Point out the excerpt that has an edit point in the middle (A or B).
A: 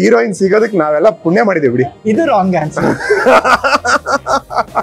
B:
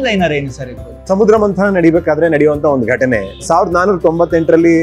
B